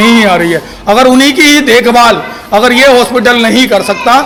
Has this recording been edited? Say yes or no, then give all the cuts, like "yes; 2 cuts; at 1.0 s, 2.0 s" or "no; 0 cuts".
no; 0 cuts